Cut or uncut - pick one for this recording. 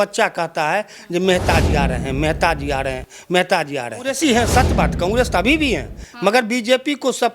cut